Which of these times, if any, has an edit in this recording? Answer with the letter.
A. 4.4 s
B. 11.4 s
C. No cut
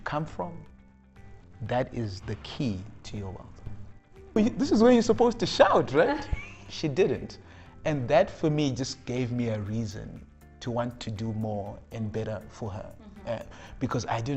A